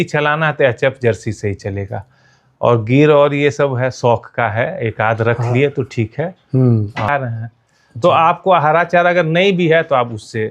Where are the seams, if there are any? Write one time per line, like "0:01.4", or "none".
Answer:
0:07.1